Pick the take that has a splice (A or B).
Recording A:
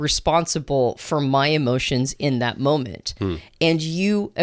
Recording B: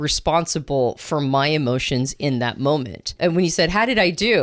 B